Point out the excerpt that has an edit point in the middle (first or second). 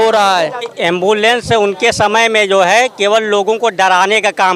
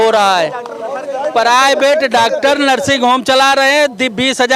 first